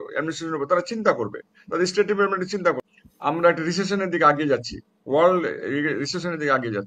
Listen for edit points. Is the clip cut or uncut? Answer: cut